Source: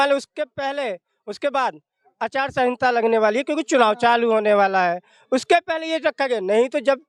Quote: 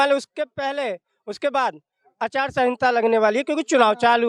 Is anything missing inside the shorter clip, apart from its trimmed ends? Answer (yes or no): no